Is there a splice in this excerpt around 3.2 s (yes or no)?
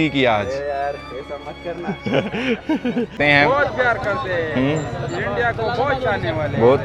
yes